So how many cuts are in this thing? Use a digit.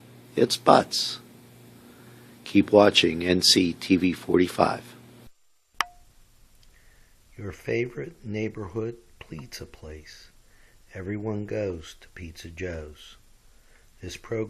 1